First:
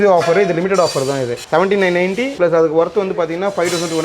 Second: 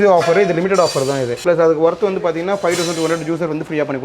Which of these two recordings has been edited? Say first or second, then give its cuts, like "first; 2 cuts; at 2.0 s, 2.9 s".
second; 1 cut; at 1.4 s